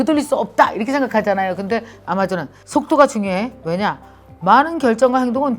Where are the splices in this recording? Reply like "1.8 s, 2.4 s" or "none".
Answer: none